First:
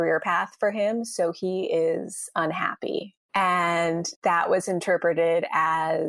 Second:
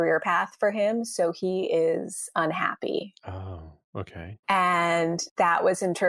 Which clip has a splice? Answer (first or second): first